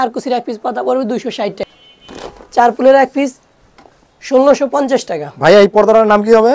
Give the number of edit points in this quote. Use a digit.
1